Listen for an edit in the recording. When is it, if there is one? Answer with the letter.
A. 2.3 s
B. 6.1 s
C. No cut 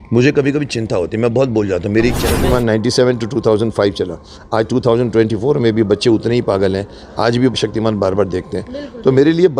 A